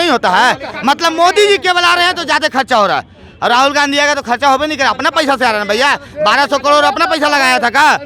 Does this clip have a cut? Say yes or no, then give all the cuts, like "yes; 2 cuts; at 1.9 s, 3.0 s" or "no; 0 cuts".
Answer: no; 0 cuts